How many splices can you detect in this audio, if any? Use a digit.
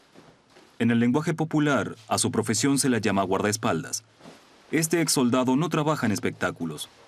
1